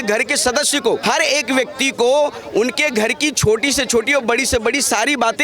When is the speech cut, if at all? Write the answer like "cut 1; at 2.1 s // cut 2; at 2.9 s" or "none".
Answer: cut 1; at 1.0 s